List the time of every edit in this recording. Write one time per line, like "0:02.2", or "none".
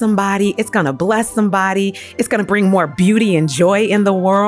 none